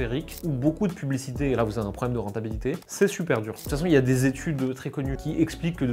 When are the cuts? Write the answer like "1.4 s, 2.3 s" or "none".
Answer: 3.6 s, 5.1 s